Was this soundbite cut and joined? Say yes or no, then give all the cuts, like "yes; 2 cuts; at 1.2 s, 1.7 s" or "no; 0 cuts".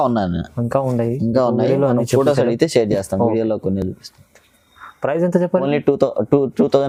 no; 0 cuts